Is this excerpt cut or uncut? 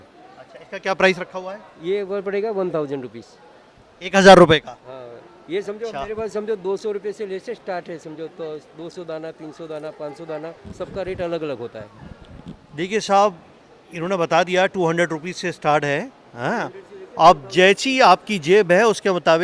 uncut